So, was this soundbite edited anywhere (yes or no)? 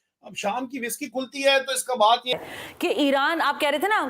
yes